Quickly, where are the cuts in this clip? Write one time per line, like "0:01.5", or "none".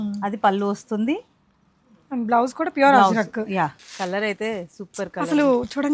0:03.8